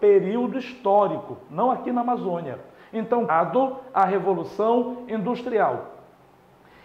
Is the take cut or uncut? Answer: cut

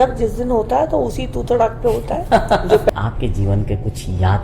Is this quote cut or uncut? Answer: cut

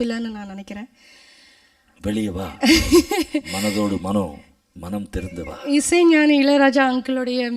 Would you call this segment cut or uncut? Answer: uncut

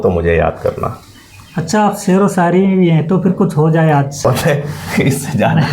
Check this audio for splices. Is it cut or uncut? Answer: cut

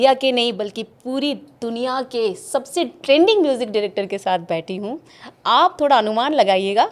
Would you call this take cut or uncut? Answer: uncut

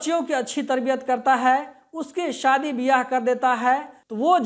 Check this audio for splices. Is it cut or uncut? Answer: uncut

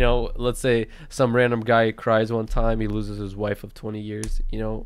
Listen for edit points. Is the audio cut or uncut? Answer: uncut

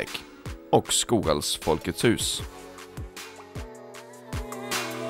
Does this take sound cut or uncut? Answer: cut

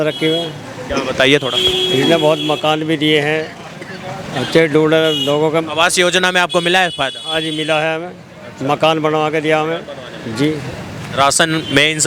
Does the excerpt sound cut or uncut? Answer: uncut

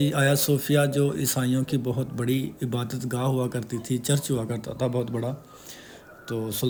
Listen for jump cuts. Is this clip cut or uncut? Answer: uncut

